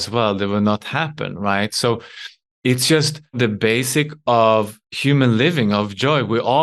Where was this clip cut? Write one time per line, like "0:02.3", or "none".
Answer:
0:03.4